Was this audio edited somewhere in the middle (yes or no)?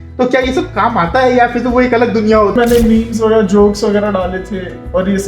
yes